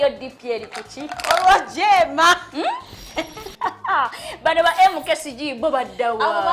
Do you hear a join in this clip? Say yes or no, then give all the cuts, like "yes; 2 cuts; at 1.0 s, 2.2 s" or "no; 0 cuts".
no; 0 cuts